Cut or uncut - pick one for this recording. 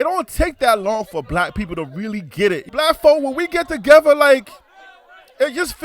cut